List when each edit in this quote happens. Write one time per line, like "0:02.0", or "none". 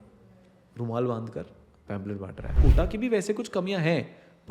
0:02.5